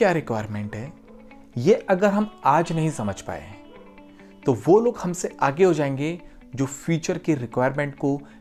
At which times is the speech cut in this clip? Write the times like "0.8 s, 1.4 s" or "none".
none